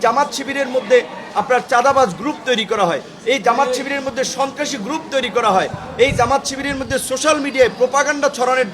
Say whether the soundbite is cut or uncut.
uncut